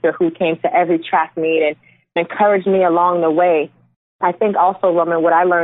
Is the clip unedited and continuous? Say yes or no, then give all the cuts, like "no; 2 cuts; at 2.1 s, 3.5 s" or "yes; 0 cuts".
no; 2 cuts; at 2.2 s, 4.0 s